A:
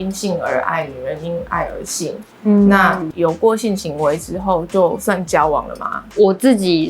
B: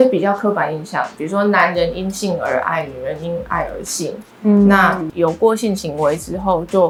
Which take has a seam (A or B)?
A